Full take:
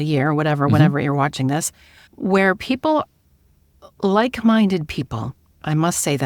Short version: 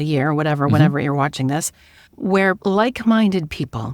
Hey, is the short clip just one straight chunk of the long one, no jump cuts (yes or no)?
no